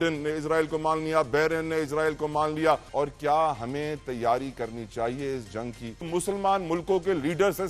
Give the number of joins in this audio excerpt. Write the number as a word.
two